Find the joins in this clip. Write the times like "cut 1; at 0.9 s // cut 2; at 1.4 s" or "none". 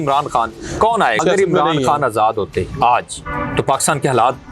cut 1; at 1.2 s